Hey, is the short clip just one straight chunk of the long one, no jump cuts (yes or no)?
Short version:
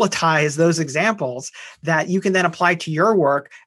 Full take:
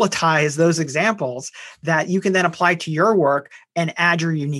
yes